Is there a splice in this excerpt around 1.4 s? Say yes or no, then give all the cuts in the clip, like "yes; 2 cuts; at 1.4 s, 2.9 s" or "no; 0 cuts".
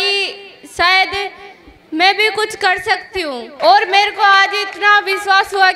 no; 1 cut; at 3.5 s